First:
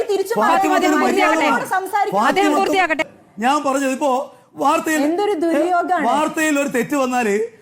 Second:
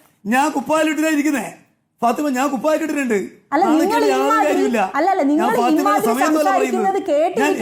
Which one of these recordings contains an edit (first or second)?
first